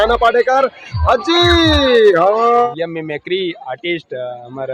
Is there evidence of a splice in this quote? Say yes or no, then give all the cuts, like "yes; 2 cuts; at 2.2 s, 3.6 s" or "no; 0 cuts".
yes; 1 cut; at 2.7 s